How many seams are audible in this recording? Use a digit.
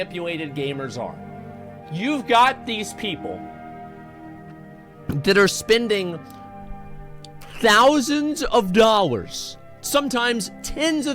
1